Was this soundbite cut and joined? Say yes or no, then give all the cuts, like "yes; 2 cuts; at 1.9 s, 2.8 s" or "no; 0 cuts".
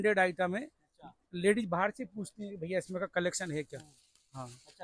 no; 0 cuts